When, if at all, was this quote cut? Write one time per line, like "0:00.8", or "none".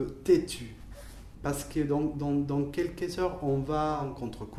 none